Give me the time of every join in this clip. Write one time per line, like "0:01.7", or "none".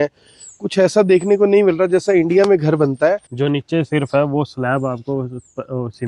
0:03.3